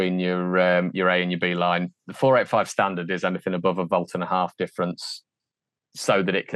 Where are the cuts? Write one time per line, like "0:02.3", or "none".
none